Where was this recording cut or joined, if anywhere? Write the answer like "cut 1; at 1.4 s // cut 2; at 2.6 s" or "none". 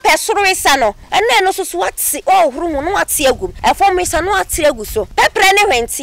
cut 1; at 1.0 s // cut 2; at 3.5 s // cut 3; at 5.1 s